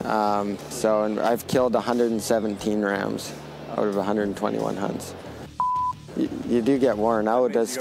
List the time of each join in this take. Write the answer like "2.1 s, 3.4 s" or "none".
0.8 s, 5.8 s